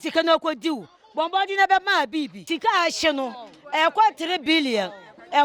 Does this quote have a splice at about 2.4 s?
yes; 1 cut; at 2.4 s

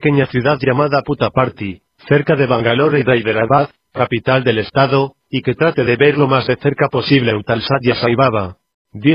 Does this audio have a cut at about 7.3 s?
yes; 1 cut; at 7.3 s

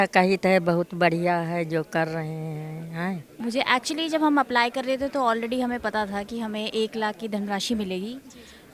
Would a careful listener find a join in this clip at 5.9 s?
no; 1 cut; at 3.3 s

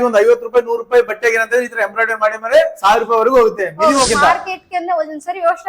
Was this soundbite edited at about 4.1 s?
yes; 1 cut; at 4.1 s

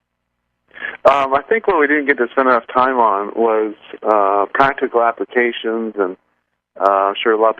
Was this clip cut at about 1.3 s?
yes; 1 cut; at 1.3 s

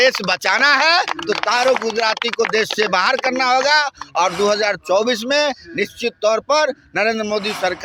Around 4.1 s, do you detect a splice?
no; 0 cuts

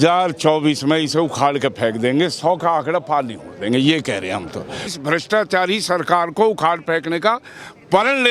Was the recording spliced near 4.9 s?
yes; 1 cut; at 4.9 s

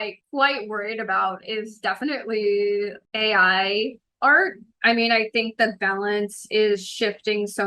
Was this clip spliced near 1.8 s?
no; 1 cut; at 4.7 s

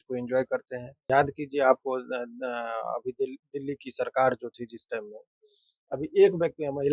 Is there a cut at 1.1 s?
yes; 1 cut; at 1.1 s

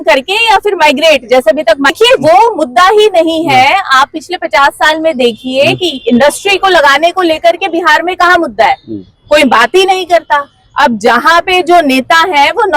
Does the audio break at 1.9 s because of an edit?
yes; 1 cut; at 1.9 s

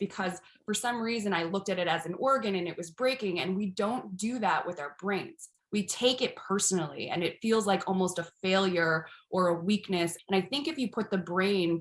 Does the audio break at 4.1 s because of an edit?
no; 1 cut; at 10.2 s

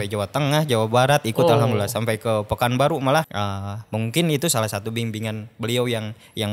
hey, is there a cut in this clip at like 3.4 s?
yes; 1 cut; at 3.4 s

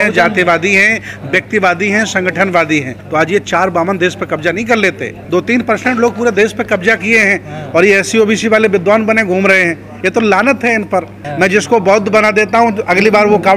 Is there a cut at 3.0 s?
yes; 3 cuts; at 3.0 s, 5.1 s, 11.2 s

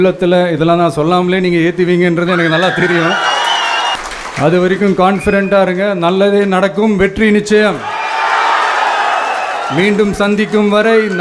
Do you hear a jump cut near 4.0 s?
yes; 1 cut; at 4.0 s

